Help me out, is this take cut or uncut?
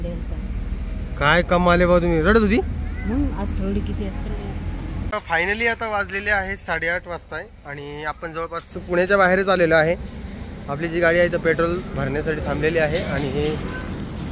cut